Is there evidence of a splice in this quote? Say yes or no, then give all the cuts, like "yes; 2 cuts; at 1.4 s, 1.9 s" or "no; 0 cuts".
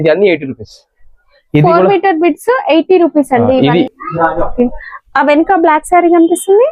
yes; 1 cut; at 3.9 s